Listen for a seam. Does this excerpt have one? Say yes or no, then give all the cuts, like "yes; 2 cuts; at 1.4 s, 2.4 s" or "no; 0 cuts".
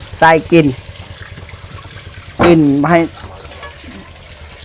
no; 0 cuts